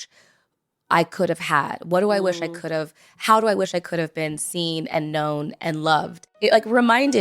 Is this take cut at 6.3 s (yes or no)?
yes